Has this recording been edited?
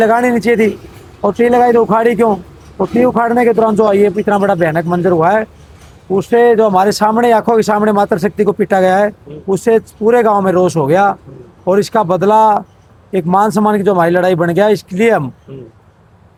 no; 0 cuts

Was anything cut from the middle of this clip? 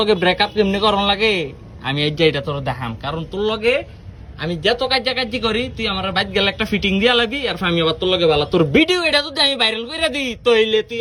no; 0 cuts

